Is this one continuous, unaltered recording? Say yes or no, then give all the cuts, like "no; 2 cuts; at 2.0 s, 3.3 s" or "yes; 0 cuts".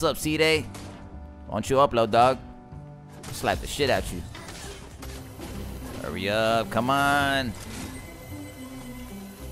yes; 0 cuts